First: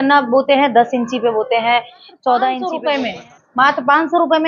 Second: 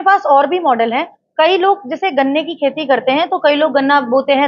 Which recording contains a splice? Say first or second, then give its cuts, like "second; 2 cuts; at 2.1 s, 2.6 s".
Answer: first; 1 cut; at 2.7 s